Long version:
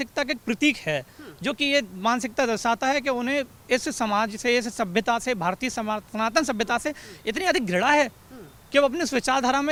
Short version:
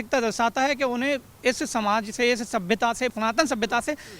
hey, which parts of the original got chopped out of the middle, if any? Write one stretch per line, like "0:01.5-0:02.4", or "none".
0:05.4-0:06.1